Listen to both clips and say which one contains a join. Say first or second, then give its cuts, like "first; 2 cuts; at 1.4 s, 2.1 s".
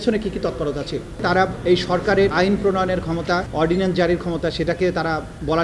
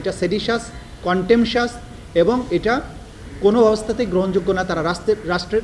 first; 2 cuts; at 1.5 s, 2.3 s